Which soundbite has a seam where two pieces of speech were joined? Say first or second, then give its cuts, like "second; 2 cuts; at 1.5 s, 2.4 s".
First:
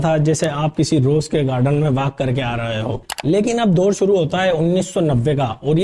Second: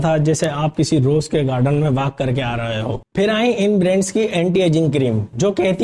second; 1 cut; at 3.0 s